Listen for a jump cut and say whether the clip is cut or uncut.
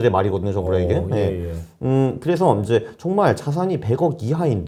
uncut